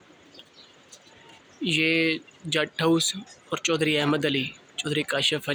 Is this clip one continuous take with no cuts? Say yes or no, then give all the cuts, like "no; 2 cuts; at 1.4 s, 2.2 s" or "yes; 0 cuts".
yes; 0 cuts